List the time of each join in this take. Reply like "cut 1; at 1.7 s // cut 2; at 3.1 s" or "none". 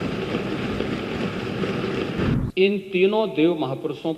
cut 1; at 2.3 s